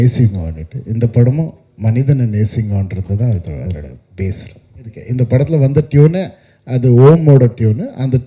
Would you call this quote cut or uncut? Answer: cut